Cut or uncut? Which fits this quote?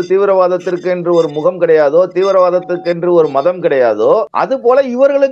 cut